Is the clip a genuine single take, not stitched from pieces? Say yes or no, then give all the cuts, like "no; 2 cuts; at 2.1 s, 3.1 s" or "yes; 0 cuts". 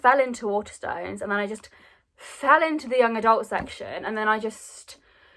yes; 0 cuts